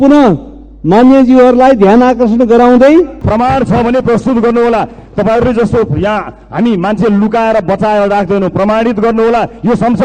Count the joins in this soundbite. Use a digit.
1